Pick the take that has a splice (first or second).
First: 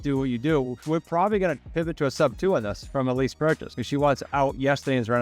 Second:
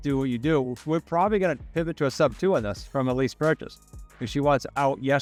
first